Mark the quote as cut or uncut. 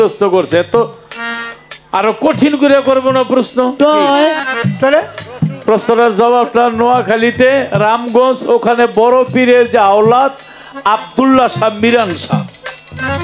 uncut